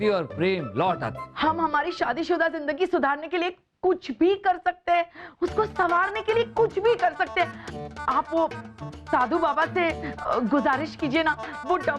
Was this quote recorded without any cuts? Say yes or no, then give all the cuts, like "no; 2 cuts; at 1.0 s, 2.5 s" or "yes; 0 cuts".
no; 1 cut; at 1.2 s